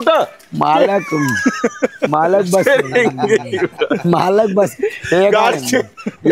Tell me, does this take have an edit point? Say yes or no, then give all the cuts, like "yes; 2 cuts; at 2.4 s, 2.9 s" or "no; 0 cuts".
no; 0 cuts